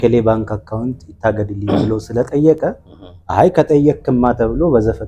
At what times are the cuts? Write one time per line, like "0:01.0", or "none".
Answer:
none